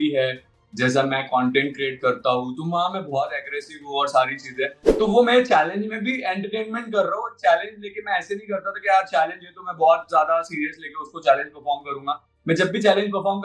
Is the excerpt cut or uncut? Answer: cut